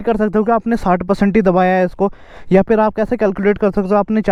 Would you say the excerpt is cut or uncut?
uncut